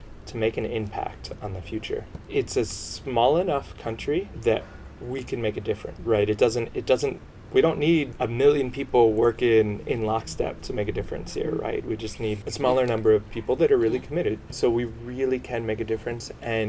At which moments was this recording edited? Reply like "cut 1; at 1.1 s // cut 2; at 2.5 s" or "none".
none